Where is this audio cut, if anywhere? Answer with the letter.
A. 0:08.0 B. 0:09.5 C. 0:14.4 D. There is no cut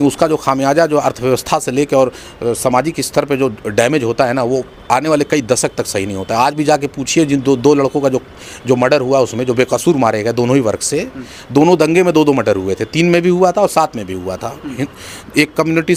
D